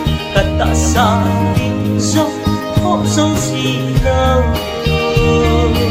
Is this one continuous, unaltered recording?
yes; 0 cuts

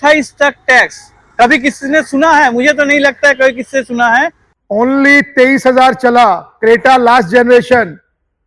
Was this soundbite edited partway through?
yes; 1 cut; at 4.4 s

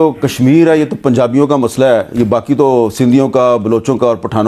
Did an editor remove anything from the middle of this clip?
no; 0 cuts

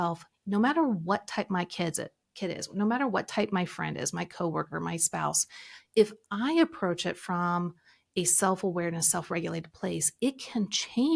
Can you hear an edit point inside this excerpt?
no; 0 cuts

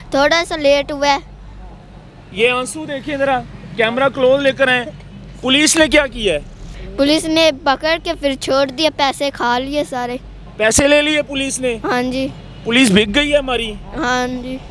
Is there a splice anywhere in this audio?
no; 0 cuts

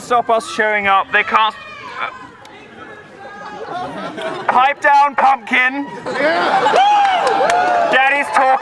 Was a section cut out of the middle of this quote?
yes; 1 cut; at 3.4 s

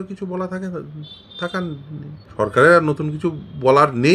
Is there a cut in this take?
yes; 1 cut; at 2.2 s

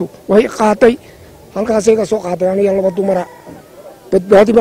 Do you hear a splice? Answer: no; 0 cuts

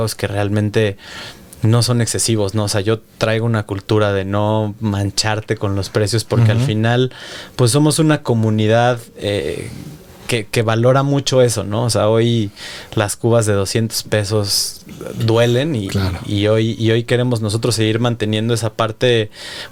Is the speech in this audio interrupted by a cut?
no; 0 cuts

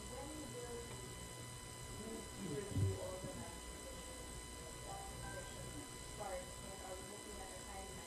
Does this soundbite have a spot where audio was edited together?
no; 0 cuts

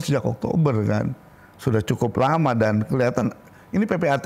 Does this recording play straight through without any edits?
yes; 0 cuts

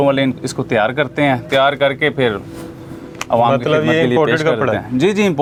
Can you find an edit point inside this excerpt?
no; 0 cuts

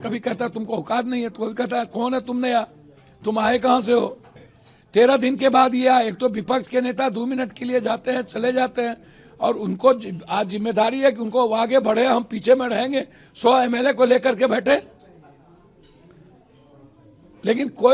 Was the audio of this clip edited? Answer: no; 0 cuts

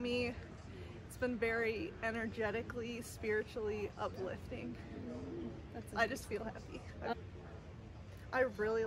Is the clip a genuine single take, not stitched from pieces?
yes; 0 cuts

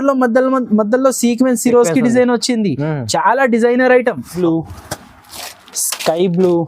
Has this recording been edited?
yes; 1 cut; at 4.3 s

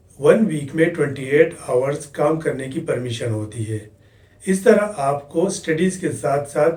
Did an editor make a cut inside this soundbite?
no; 0 cuts

